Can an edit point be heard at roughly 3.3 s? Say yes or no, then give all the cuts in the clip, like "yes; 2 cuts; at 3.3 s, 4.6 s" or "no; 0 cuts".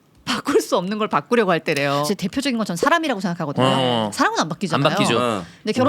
no; 1 cut; at 2.1 s